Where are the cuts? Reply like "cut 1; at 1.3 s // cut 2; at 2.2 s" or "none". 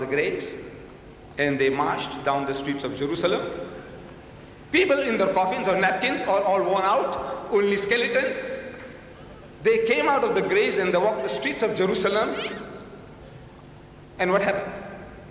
cut 1; at 10.1 s